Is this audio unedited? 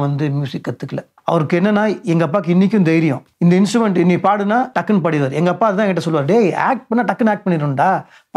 no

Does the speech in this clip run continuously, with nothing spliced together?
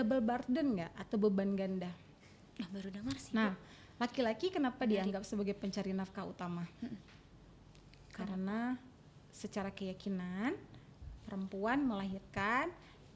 yes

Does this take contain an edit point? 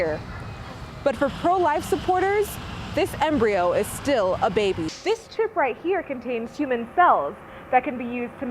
yes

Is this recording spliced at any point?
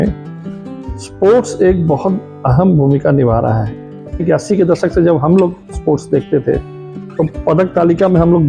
yes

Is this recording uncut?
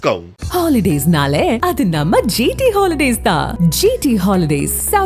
yes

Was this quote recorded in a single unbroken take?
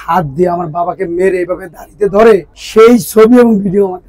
no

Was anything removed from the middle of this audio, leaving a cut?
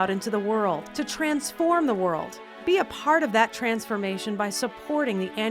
no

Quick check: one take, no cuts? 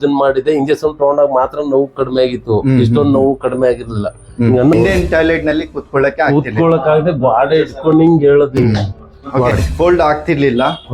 no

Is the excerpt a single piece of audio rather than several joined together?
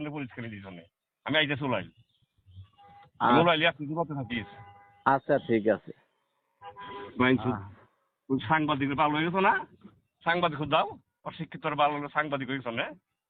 yes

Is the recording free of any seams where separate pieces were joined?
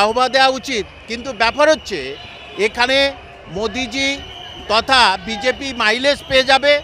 yes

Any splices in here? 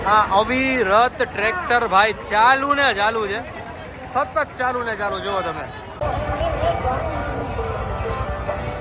no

